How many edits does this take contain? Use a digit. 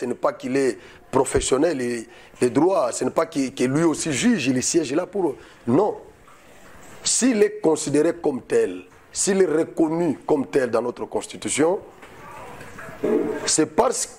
0